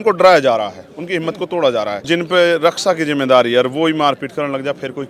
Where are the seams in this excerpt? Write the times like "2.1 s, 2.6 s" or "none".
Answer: 2.1 s